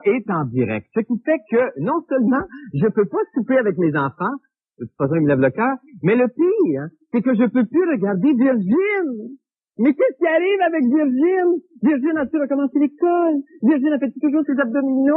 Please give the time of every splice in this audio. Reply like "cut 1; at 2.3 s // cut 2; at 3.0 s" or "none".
cut 1; at 10.1 s